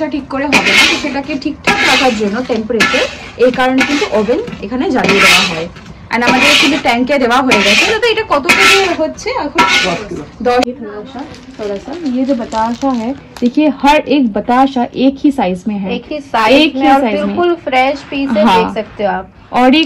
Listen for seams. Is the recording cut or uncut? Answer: cut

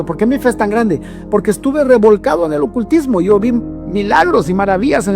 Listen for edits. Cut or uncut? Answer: uncut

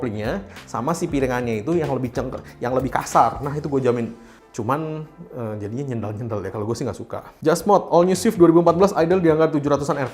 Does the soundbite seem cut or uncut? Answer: uncut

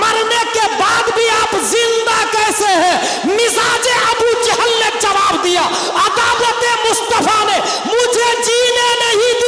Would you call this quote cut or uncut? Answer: uncut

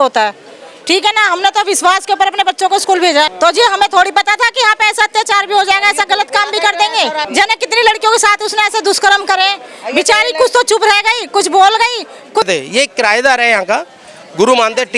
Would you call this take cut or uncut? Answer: cut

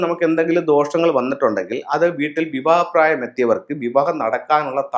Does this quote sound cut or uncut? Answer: uncut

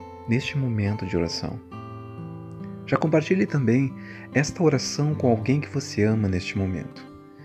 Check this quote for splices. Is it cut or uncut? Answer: uncut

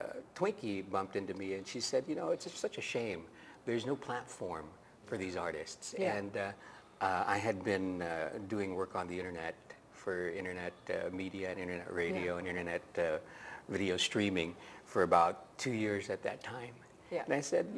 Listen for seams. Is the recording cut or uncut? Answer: cut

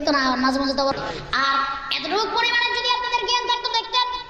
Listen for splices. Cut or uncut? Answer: cut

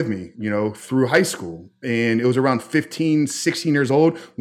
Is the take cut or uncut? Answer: uncut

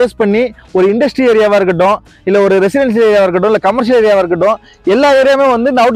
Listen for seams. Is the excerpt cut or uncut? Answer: uncut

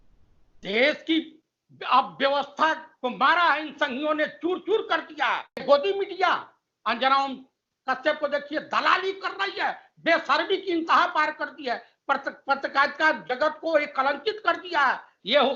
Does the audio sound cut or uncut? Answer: cut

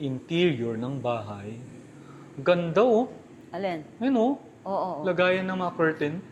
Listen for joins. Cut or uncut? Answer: uncut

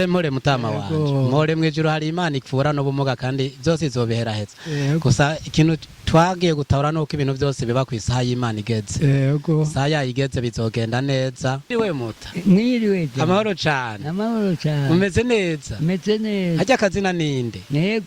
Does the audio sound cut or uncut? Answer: cut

